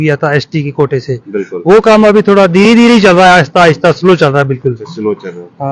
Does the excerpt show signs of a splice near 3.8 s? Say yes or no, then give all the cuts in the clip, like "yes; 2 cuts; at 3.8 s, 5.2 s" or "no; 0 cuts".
no; 0 cuts